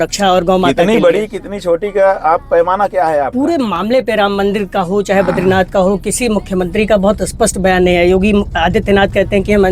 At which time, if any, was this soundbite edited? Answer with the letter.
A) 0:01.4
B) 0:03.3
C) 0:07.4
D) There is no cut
B